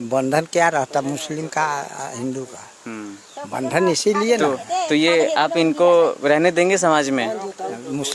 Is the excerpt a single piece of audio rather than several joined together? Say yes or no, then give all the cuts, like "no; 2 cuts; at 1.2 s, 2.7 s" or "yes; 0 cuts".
yes; 0 cuts